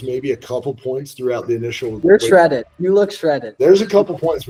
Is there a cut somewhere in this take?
no; 0 cuts

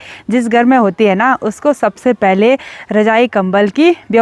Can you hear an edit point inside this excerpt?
no; 0 cuts

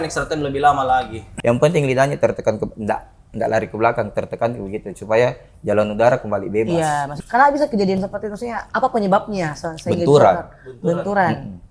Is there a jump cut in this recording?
yes; 3 cuts; at 1.2 s, 7.1 s, 8.6 s

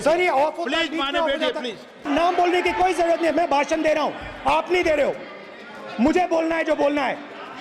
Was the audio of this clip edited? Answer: yes; 1 cut; at 2.1 s

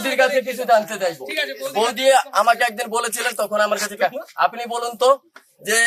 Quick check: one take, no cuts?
yes; 0 cuts

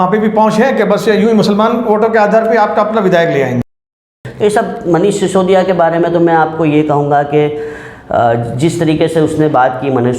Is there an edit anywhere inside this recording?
yes; 1 cut; at 4.0 s

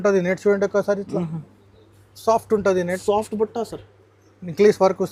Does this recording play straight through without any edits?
yes; 0 cuts

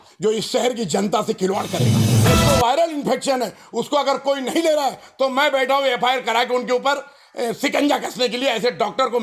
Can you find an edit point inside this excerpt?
yes; 1 cut; at 2.1 s

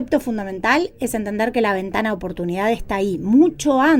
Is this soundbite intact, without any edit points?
yes; 0 cuts

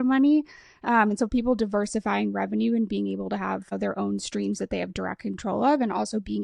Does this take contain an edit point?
yes; 1 cut; at 3.7 s

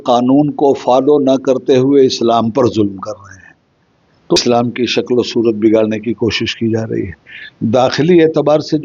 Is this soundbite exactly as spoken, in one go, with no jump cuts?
no; 1 cut; at 4.4 s

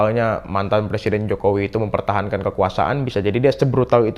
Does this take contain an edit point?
no; 0 cuts

